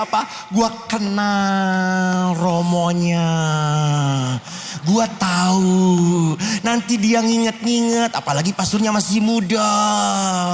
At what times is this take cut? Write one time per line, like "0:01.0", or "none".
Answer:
none